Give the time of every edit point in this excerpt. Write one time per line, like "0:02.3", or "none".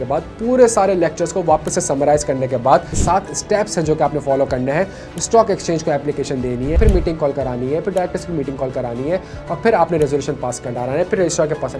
0:03.0
0:06.8